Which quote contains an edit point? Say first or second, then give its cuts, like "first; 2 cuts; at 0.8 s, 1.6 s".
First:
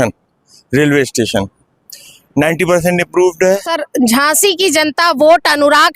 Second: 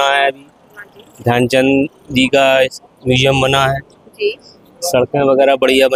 first; 1 cut; at 3.8 s